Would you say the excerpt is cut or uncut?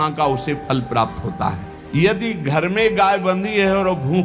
cut